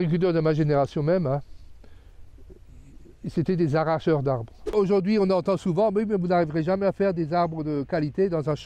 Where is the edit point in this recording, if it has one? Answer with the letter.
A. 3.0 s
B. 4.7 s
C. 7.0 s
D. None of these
B